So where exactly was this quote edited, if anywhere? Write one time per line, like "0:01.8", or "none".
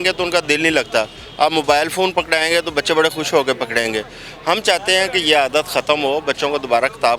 none